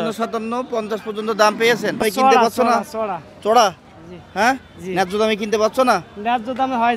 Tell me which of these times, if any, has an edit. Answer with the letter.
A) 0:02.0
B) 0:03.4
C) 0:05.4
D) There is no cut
A